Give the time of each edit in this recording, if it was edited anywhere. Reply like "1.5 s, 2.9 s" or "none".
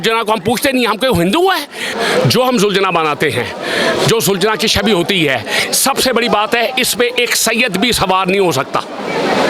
1.8 s